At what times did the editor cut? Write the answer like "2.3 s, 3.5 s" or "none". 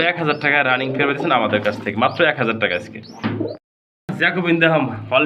none